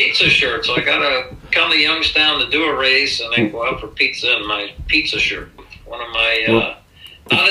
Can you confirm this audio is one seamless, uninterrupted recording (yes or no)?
no